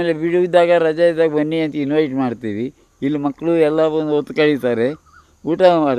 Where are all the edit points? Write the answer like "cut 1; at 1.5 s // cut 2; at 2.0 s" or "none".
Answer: none